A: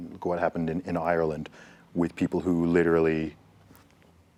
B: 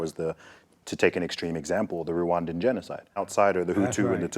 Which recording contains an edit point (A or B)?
B